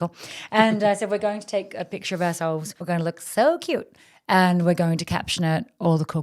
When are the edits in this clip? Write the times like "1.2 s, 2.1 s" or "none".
2.7 s